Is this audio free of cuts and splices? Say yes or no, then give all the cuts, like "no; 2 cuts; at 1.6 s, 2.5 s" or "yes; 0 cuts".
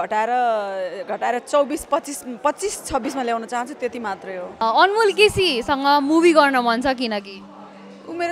no; 1 cut; at 4.6 s